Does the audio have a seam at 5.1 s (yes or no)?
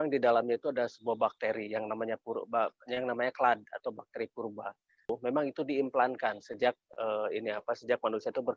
yes